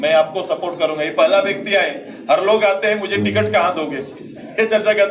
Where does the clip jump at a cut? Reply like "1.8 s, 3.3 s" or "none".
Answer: none